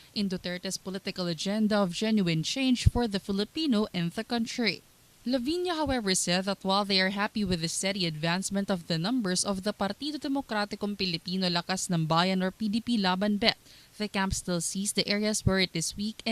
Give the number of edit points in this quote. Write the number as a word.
one